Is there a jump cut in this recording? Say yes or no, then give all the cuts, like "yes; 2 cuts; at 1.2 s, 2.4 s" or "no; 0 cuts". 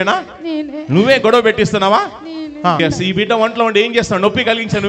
no; 0 cuts